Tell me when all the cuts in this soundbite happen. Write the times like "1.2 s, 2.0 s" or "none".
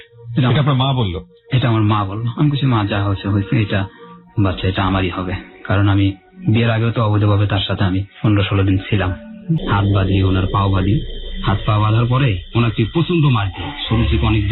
9.6 s